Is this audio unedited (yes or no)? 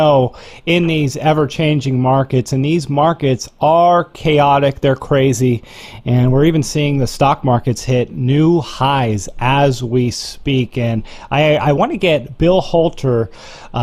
yes